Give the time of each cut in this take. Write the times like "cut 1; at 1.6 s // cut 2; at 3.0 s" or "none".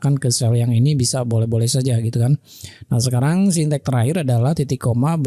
none